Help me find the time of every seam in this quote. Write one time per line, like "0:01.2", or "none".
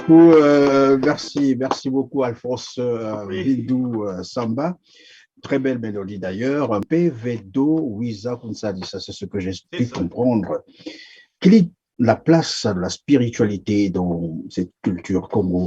0:11.2